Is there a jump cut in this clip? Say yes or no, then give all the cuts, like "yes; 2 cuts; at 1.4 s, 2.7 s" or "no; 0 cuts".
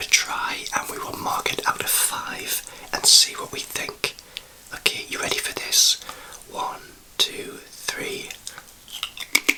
no; 0 cuts